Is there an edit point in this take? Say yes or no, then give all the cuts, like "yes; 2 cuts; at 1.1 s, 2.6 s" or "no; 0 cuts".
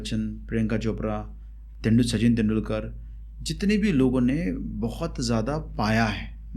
no; 0 cuts